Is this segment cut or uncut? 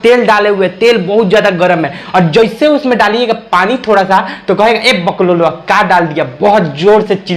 uncut